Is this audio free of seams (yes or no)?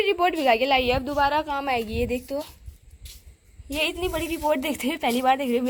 yes